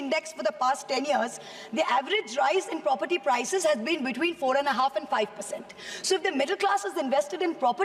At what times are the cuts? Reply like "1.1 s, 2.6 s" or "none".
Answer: none